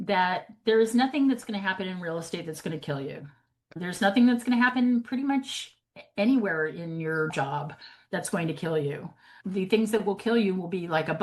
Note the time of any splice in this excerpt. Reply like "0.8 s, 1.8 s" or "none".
none